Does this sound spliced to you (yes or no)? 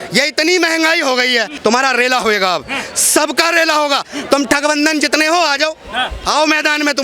yes